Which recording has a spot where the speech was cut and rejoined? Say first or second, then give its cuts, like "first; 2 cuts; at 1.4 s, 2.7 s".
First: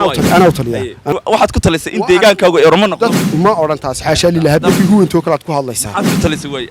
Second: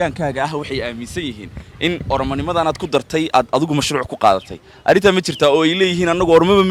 first; 3 cuts; at 1.0 s, 3.3 s, 4.8 s